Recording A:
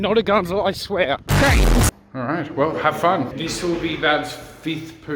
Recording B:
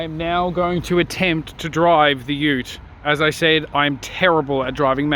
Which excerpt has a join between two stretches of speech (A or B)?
A